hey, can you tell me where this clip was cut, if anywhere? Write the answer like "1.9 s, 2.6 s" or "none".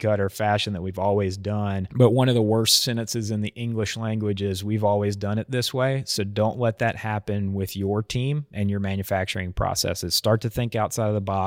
8.5 s